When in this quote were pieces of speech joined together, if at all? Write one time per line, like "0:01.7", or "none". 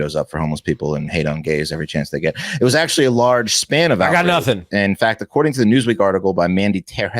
0:04.7

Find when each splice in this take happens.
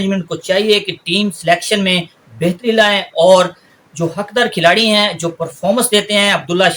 none

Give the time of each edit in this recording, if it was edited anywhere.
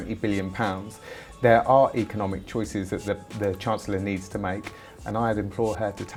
none

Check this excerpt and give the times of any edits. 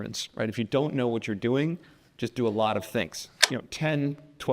0:03.4

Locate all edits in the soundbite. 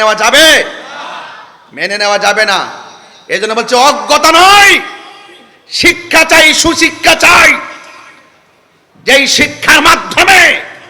none

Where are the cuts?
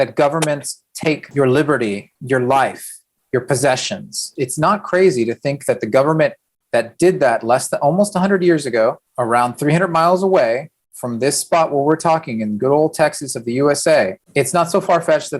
0:01.2
0:04.4
0:09.1
0:14.2

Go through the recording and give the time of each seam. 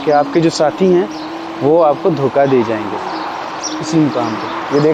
none

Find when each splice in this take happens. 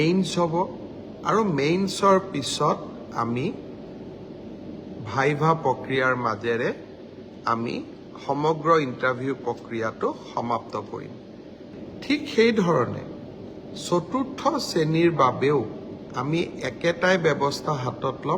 0:11.7

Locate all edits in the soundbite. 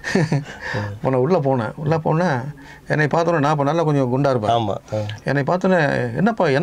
none

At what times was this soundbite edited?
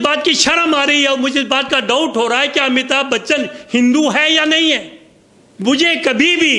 none

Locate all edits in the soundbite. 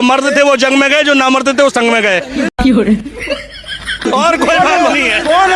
none

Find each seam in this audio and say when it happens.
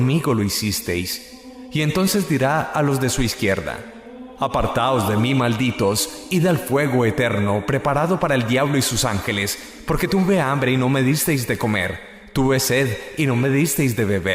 0:06.5

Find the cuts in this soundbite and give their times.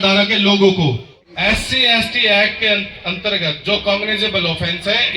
0:01.1

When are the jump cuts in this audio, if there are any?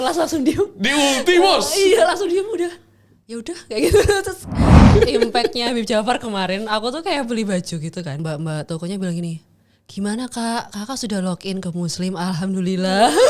0:04.9
0:08.2

